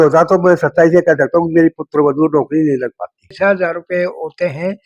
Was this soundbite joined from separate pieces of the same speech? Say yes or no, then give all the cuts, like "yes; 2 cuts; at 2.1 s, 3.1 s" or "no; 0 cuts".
yes; 1 cut; at 3.3 s